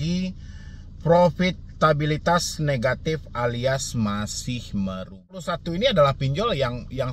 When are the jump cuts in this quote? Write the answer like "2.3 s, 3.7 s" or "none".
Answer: 5.5 s